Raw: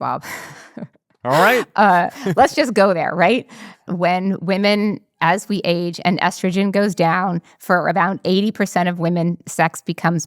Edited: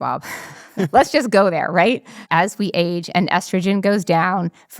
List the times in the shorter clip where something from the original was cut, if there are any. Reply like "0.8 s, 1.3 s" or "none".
0.9 s, 2.2 s